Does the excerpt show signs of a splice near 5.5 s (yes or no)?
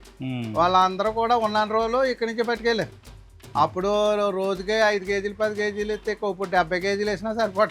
no